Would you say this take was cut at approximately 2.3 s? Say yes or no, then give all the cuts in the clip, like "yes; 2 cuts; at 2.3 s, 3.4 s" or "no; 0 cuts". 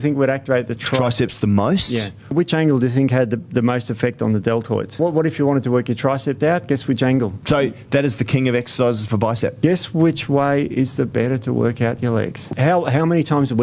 yes; 5 cuts; at 2.3 s, 4.9 s, 7.4 s, 9.5 s, 12.5 s